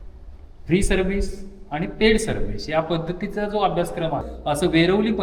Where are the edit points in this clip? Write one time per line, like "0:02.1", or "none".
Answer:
0:04.3